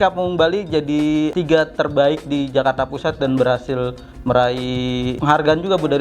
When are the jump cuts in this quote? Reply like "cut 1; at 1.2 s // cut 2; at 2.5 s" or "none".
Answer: cut 1; at 1.3 s // cut 2; at 5.2 s